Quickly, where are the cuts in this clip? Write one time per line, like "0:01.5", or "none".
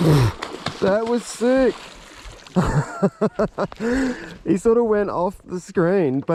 none